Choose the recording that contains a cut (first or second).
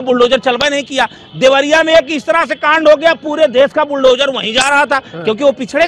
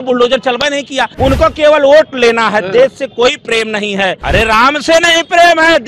second